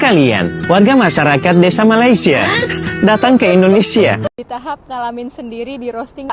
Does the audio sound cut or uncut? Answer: cut